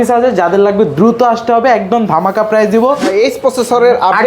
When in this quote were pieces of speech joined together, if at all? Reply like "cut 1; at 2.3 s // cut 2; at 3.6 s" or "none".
cut 1; at 3.1 s